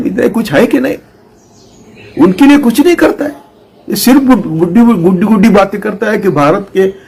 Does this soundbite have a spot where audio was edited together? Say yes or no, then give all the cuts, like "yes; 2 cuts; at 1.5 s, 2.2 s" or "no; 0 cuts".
no; 0 cuts